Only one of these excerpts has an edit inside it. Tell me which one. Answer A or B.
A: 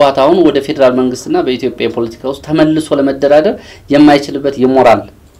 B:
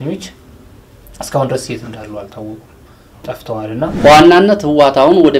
B